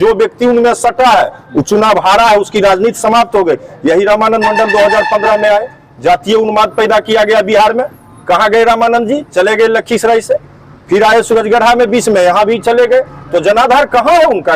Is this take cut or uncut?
uncut